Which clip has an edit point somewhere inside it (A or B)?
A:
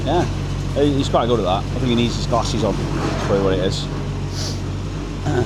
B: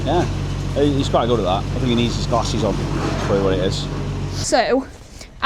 B